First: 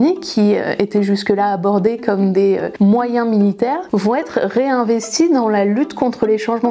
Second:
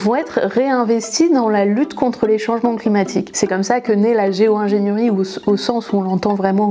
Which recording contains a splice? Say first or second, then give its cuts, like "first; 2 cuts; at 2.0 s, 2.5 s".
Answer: first; 1 cut; at 2.7 s